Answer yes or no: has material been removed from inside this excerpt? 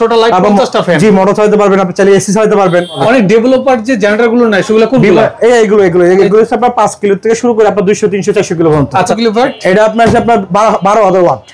yes